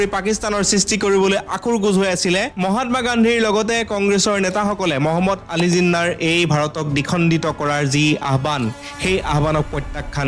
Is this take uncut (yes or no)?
yes